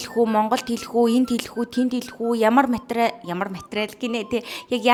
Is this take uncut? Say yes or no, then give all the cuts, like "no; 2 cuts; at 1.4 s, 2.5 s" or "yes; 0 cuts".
yes; 0 cuts